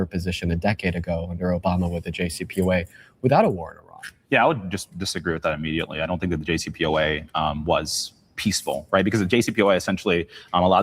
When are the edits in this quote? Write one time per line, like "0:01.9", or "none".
0:09.8